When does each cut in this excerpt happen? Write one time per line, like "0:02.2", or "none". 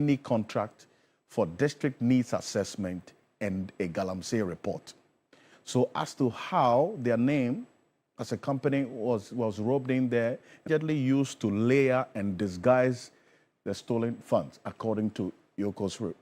0:10.7